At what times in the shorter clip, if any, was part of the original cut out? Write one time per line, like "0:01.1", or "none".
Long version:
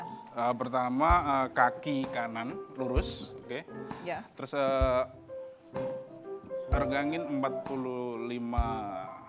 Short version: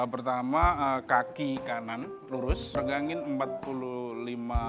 0:02.8